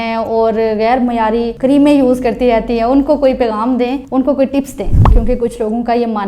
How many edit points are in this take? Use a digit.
1